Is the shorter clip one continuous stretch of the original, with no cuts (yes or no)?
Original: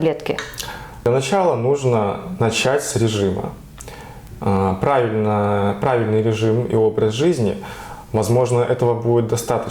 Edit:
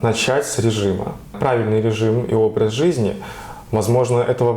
no